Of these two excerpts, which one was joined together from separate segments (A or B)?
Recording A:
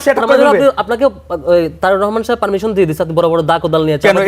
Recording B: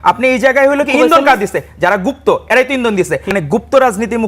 B